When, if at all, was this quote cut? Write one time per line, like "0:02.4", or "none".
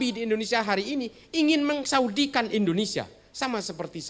none

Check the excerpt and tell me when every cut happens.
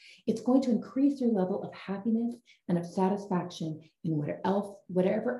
none

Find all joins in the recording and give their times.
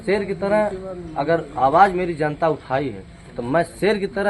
none

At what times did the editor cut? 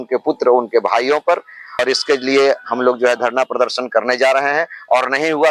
0:01.8

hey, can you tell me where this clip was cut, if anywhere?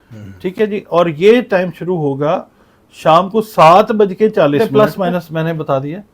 0:04.6

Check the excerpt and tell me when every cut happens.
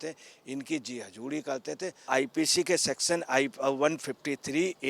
0:02.1

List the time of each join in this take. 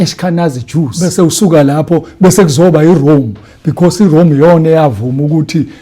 0:01.0

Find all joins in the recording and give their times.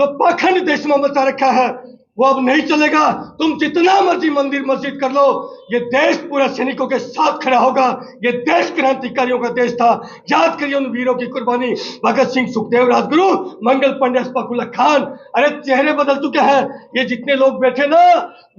none

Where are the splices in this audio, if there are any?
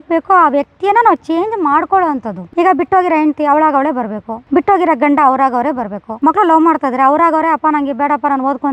none

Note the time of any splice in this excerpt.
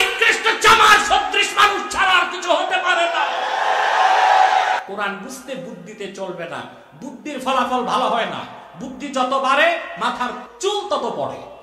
0:04.8
0:10.5

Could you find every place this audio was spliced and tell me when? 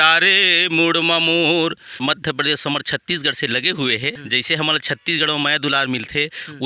0:01.9
0:04.2

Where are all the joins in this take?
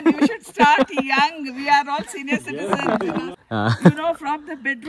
0:03.4

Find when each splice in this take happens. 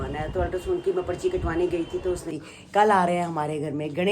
0:02.2

